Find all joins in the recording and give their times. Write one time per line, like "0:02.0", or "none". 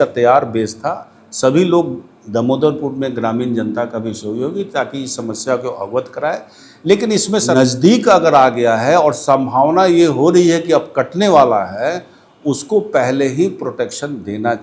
0:07.5